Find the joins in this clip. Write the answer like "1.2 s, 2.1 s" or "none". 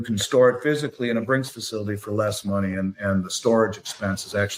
none